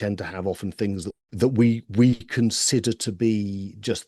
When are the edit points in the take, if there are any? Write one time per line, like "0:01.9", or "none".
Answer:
0:01.2